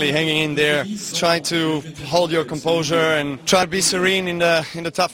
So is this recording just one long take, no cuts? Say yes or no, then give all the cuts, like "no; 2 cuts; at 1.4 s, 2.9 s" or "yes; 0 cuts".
no; 2 cuts; at 1.0 s, 3.4 s